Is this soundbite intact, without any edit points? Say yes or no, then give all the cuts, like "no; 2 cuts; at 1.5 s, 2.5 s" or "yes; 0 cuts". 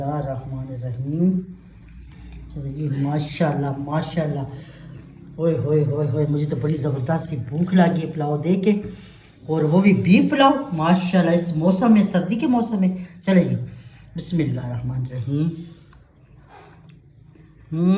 yes; 0 cuts